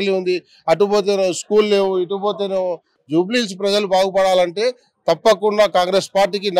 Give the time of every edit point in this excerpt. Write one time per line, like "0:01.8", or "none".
0:02.9